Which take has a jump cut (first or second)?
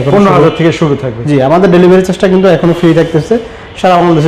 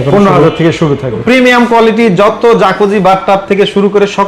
second